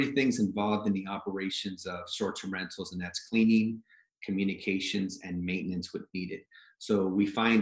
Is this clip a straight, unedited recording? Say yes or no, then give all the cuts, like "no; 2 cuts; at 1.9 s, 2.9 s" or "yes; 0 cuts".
yes; 0 cuts